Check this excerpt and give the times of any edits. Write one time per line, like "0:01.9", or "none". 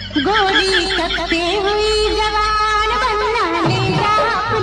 none